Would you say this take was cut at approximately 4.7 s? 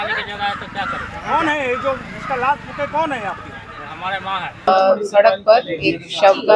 yes; 1 cut; at 4.7 s

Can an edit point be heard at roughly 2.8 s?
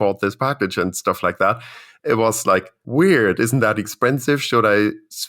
yes; 1 cut; at 2.8 s

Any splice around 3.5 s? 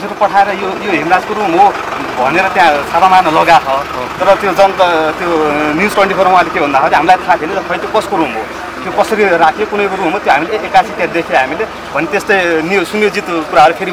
no; 0 cuts

